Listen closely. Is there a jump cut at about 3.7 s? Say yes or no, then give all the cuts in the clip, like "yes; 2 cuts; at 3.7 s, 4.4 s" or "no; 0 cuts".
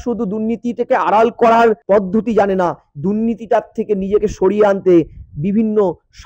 no; 1 cut; at 1.8 s